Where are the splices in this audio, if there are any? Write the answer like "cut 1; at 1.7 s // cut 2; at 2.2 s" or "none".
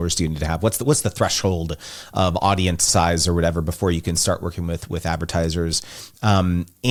none

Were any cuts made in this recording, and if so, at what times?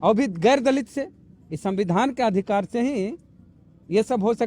none

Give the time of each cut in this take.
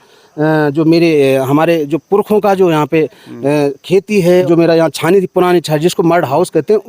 cut 1; at 4.4 s

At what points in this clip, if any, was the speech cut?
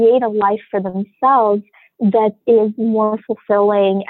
none

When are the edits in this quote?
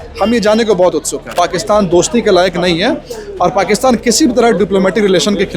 cut 1; at 1.3 s

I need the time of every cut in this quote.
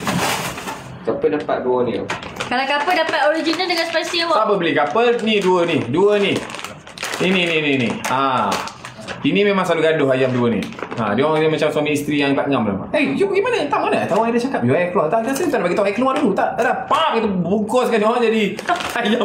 none

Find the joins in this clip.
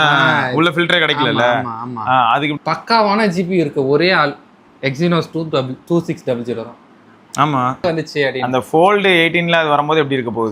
cut 1; at 2.6 s // cut 2; at 7.8 s

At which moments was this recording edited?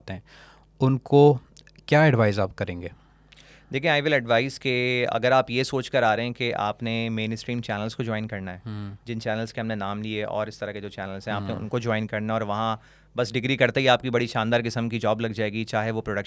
none

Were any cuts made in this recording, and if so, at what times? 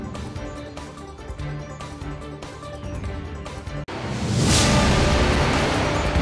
cut 1; at 2.2 s

